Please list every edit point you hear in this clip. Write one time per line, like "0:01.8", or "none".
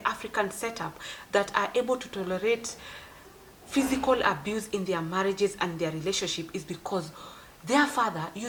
none